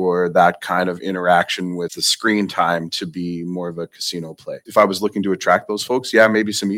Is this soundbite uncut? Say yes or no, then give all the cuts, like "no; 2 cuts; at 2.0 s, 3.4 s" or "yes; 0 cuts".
no; 2 cuts; at 2.0 s, 4.6 s